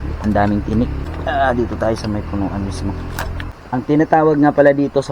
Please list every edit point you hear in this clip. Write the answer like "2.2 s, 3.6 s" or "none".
1.0 s, 3.5 s